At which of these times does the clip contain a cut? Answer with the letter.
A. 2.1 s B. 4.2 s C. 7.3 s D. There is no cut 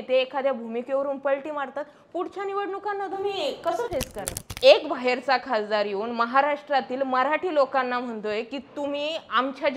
B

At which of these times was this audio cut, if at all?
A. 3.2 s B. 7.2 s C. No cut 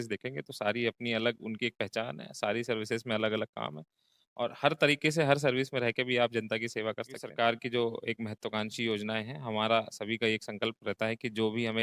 B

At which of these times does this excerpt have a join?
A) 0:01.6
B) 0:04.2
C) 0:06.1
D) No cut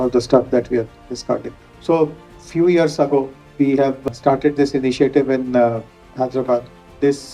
D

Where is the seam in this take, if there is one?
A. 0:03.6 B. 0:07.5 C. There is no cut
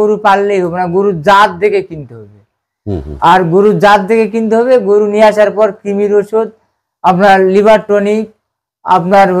C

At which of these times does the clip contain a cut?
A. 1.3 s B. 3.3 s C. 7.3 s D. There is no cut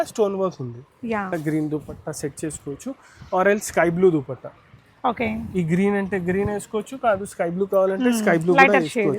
A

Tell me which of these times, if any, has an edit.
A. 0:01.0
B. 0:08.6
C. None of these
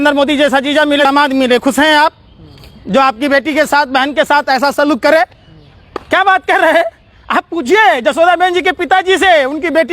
A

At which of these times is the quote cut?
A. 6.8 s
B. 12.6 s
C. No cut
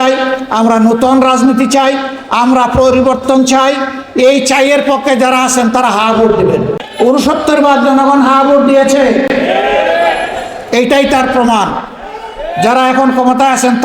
A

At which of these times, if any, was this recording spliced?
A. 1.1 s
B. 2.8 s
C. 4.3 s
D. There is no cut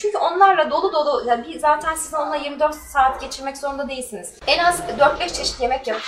C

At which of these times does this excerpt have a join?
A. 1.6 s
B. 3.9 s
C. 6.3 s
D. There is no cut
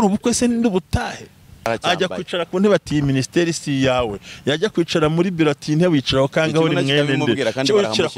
A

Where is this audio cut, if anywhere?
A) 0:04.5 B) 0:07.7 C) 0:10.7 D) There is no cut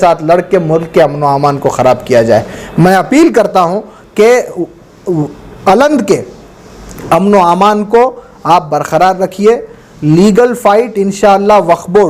D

